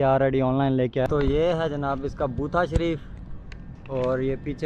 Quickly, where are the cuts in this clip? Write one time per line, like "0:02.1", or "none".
0:01.1